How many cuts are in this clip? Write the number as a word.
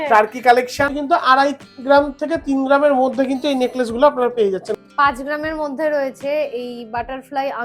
two